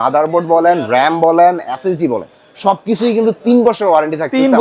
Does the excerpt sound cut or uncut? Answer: uncut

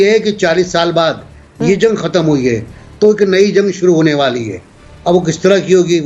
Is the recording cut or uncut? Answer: uncut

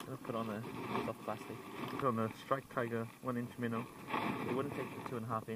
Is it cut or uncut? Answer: cut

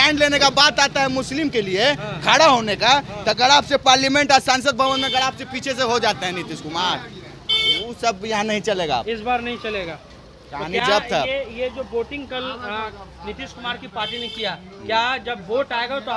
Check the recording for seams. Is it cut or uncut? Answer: uncut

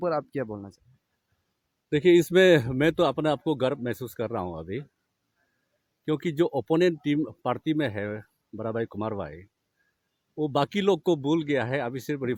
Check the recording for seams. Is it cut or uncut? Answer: uncut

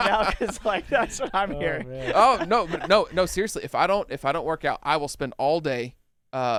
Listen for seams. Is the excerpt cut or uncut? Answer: uncut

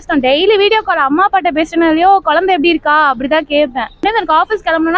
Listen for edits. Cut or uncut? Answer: cut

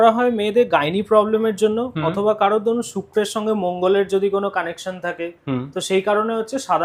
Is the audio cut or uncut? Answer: uncut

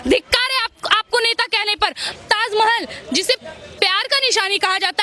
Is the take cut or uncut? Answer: cut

